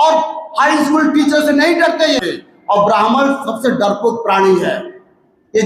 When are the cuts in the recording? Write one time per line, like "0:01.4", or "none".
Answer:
0:02.2